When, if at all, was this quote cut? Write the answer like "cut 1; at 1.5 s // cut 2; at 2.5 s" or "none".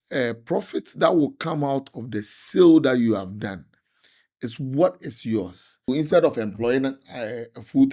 cut 1; at 5.9 s